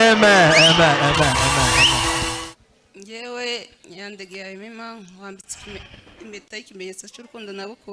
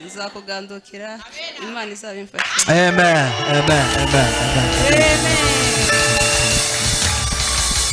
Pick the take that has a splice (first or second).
first